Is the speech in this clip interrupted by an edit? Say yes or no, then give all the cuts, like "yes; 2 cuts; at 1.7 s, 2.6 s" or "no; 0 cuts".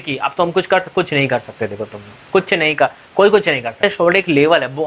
yes; 1 cut; at 3.8 s